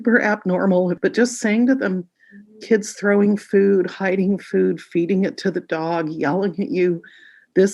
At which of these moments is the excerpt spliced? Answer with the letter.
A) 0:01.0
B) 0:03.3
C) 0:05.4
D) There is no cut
A